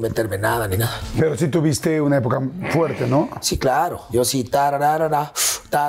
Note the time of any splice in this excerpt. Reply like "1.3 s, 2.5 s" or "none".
1.0 s, 4.0 s